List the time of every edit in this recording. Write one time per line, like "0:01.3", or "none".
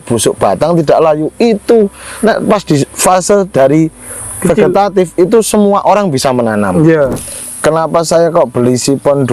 0:07.1

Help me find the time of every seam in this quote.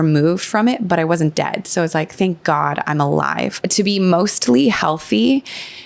0:03.6

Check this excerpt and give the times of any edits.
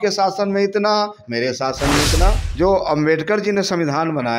0:02.4

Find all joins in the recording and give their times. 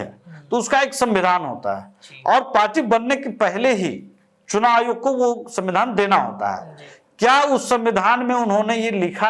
none

